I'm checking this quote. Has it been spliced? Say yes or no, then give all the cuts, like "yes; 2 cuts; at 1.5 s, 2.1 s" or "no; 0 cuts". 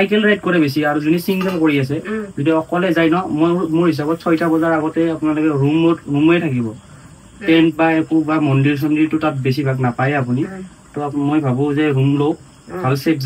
no; 0 cuts